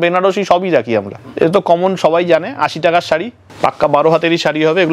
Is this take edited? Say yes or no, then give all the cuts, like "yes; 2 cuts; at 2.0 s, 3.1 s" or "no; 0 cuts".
yes; 2 cuts; at 1.1 s, 3.4 s